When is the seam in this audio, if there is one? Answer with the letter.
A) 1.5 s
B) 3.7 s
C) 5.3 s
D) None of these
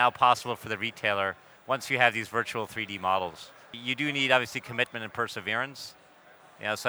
B